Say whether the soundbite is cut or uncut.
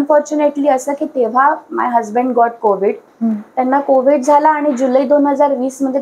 cut